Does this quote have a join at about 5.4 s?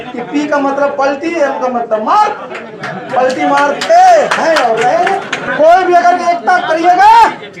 yes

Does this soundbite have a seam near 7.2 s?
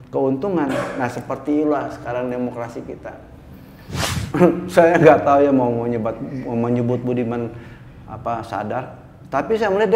no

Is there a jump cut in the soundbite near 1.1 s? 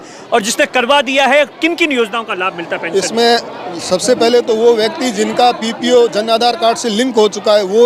no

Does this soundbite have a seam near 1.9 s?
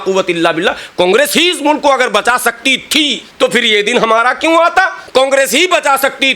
no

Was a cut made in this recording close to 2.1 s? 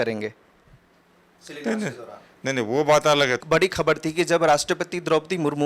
no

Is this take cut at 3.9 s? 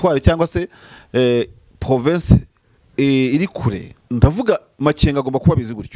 yes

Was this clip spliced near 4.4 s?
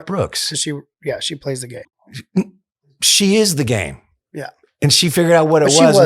no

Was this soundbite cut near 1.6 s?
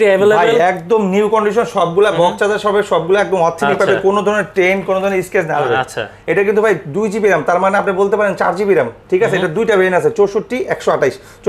no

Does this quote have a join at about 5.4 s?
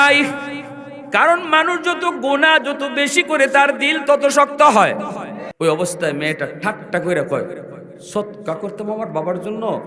yes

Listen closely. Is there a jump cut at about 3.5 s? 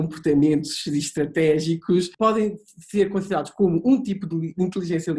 no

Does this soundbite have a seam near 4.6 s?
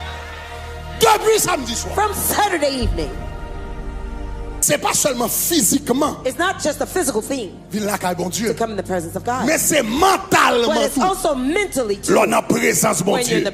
yes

